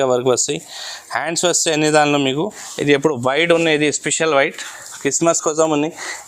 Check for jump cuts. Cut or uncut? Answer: cut